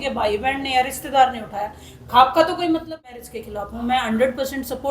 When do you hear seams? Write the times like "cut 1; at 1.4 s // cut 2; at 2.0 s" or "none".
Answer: cut 1; at 3.2 s